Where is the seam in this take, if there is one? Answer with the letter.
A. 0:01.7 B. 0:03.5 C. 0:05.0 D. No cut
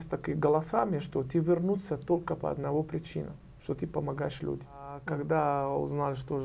C